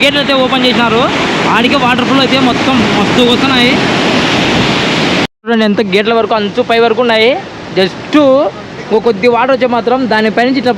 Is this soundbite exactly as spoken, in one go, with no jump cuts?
no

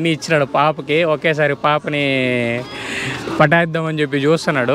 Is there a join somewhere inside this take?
no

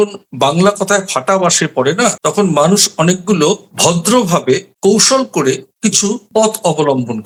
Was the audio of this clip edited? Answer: no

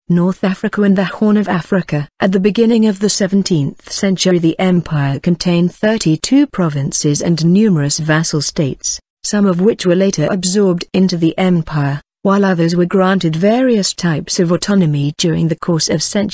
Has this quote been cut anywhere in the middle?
no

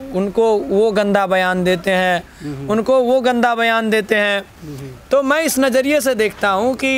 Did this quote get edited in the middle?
no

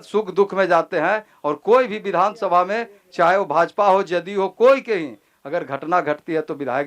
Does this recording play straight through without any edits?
yes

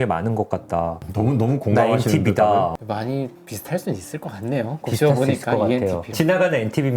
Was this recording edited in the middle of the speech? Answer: yes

